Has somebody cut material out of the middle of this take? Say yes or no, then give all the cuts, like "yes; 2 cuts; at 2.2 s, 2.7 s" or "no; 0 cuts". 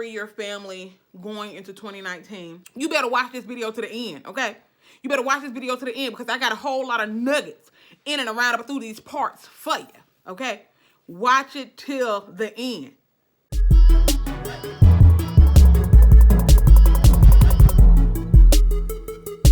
yes; 2 cuts; at 2.6 s, 13.5 s